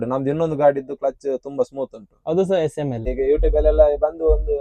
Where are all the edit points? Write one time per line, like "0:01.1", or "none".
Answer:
0:03.1